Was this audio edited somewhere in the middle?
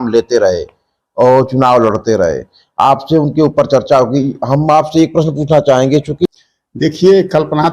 yes; 1 cut; at 6.1 s

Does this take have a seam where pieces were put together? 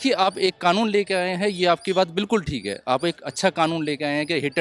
no; 0 cuts

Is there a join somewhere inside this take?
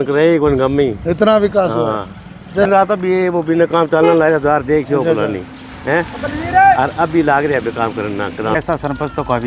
yes; 2 cuts; at 2.7 s, 8.6 s

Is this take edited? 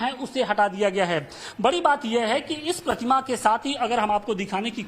yes; 1 cut; at 2.0 s

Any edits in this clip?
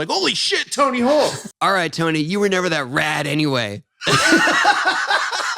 yes; 1 cut; at 1.4 s

